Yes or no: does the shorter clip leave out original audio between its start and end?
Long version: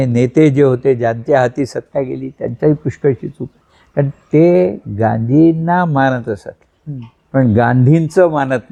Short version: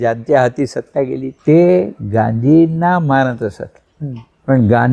yes